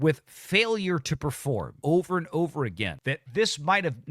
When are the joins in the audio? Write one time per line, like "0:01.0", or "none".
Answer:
0:01.7